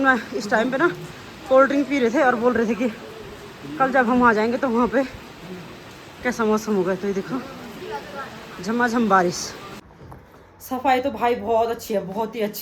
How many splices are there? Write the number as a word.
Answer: one